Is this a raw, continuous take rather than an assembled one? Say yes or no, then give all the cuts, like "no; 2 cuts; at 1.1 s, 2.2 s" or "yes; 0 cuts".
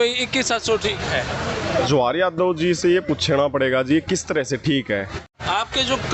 no; 2 cuts; at 1.9 s, 5.2 s